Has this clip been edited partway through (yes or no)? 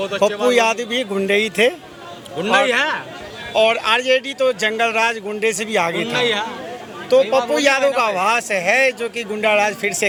no